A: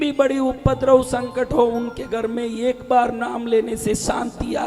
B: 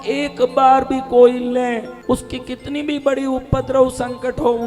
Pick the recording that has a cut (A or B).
B